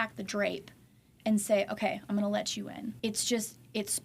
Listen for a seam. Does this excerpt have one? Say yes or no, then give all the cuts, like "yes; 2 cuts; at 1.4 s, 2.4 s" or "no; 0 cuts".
yes; 1 cut; at 2.9 s